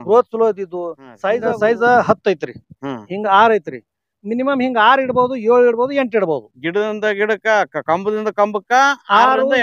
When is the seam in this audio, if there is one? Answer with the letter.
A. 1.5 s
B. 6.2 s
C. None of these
A